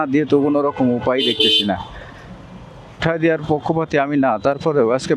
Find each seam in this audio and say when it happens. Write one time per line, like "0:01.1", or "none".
0:03.0